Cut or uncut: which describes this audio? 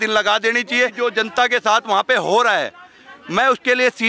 cut